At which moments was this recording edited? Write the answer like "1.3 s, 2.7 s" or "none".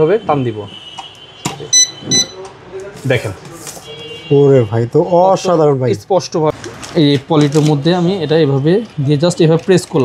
6.5 s